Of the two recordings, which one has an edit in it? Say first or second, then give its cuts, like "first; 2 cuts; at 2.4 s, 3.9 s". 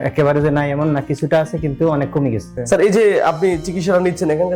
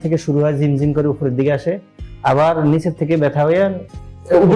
first; 1 cut; at 2.5 s